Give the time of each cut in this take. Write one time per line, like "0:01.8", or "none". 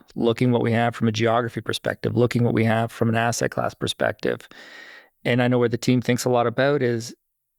none